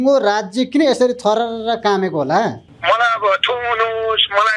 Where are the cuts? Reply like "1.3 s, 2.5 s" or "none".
2.7 s